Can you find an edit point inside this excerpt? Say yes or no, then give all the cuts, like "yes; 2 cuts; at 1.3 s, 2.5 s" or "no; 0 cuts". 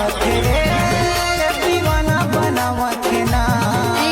no; 0 cuts